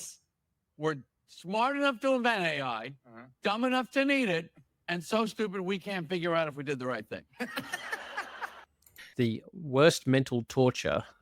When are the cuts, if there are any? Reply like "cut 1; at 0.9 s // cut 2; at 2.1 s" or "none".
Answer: cut 1; at 9.0 s